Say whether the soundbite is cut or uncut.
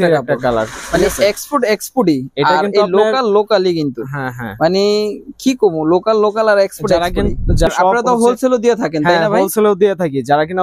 cut